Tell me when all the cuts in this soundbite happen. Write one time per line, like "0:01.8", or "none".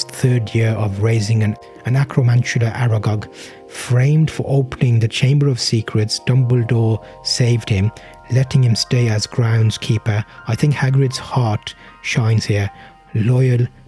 0:01.7